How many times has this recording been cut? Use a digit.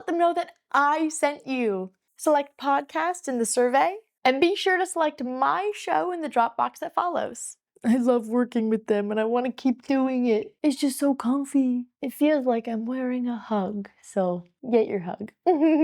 1